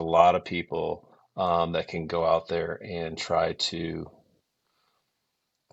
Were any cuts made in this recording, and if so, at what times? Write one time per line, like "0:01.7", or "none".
none